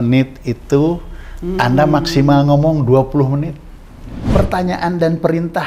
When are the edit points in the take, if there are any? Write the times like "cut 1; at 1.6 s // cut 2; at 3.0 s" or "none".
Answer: cut 1; at 4.2 s